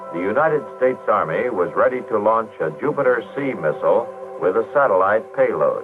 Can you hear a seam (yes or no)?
yes